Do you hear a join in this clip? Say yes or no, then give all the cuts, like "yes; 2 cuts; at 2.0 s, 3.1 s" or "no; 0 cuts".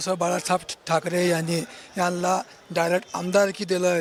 no; 0 cuts